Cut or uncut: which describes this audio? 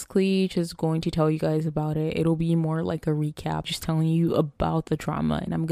uncut